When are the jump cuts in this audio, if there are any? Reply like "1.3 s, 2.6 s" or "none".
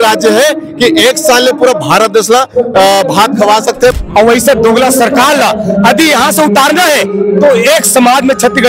4.0 s

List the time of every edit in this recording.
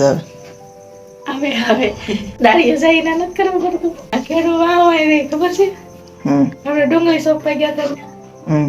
2.3 s, 4.1 s

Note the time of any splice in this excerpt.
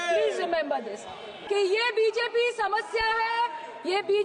1.3 s

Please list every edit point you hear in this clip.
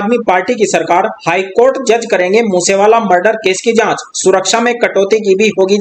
none

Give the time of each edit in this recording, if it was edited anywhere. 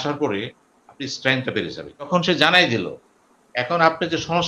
2.1 s

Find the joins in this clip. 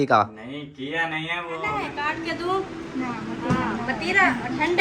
1.9 s

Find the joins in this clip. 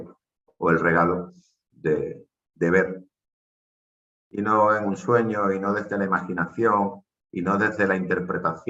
none

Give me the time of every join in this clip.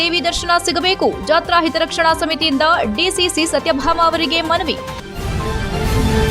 4.9 s

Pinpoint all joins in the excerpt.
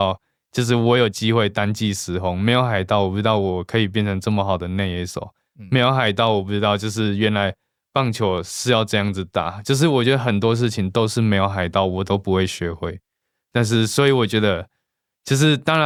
none

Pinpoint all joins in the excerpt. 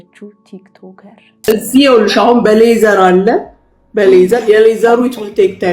1.5 s

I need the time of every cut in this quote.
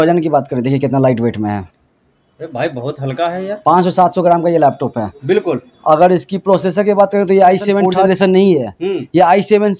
7.9 s

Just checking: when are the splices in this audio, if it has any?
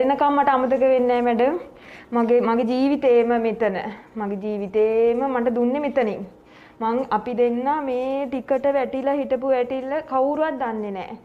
none

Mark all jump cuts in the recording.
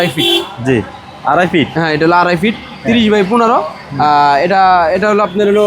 none

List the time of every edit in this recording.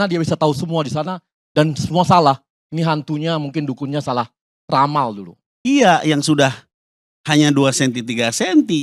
5.6 s

